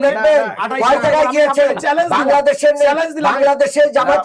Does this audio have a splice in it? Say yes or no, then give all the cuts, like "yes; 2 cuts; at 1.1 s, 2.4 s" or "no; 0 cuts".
no; 0 cuts